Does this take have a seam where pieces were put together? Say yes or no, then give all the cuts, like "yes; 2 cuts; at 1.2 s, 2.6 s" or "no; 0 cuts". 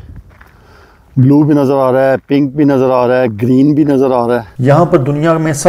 yes; 1 cut; at 4.5 s